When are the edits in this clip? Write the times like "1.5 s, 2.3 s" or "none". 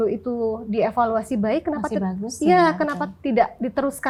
none